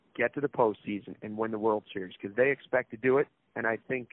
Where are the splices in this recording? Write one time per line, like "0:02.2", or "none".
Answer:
none